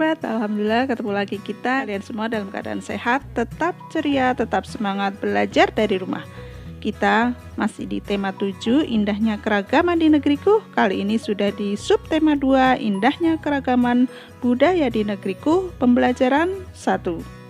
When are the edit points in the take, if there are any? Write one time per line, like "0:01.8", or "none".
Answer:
0:01.8